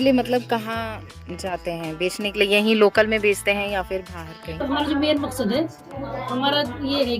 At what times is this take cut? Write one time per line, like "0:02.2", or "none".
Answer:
0:04.6